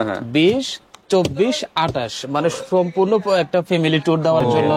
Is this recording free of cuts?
yes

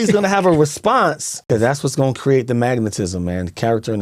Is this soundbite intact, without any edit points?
no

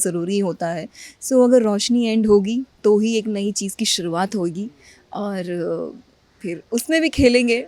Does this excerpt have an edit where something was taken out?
no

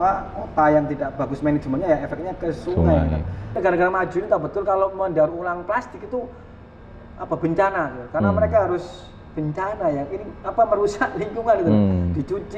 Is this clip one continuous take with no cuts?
no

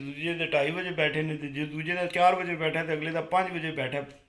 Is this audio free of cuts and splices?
yes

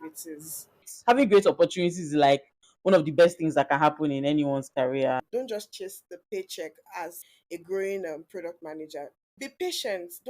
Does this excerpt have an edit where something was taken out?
yes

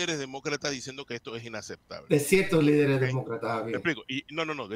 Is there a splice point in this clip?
no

